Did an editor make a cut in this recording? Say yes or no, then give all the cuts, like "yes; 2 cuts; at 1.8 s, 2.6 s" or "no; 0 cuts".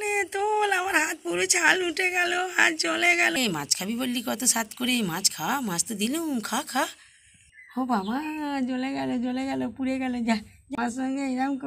yes; 2 cuts; at 3.4 s, 10.8 s